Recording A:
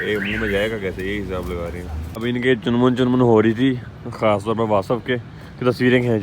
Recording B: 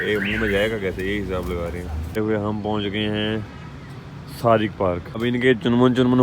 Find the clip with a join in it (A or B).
A